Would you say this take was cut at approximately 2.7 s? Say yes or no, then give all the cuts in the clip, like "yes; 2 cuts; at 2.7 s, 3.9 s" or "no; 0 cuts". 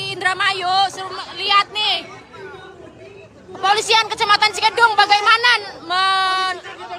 no; 0 cuts